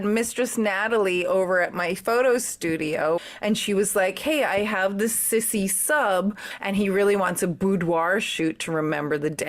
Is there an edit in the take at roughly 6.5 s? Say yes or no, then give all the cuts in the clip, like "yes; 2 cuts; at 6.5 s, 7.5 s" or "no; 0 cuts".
yes; 2 cuts; at 3.2 s, 6.5 s